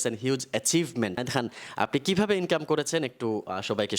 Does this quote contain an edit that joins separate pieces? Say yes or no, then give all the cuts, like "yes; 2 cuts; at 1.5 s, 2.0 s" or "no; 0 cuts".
yes; 1 cut; at 1.2 s